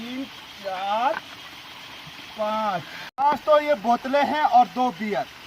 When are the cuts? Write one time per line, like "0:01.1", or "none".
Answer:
0:03.0